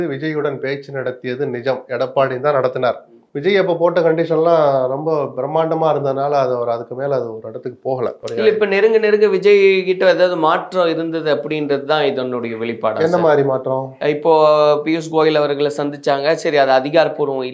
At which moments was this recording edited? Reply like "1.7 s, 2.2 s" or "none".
none